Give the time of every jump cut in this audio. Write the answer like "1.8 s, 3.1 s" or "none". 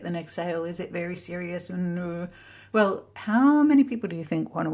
none